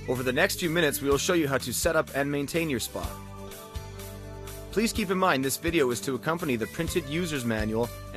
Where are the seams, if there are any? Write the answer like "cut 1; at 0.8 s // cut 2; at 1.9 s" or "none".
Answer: none